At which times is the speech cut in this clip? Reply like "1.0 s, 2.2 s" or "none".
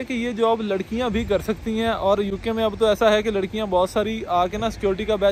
none